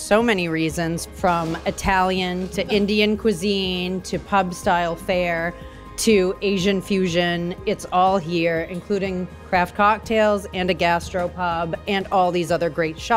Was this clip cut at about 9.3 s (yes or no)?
no